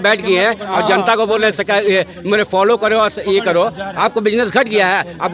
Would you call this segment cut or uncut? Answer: uncut